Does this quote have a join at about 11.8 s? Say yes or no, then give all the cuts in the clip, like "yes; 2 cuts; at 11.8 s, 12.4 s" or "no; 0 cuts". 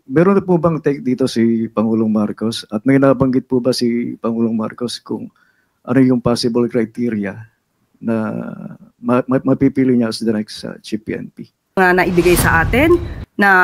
yes; 1 cut; at 11.8 s